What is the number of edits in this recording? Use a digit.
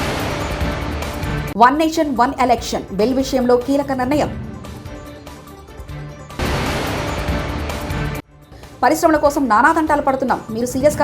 1